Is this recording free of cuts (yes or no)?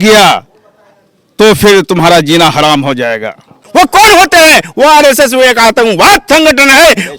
no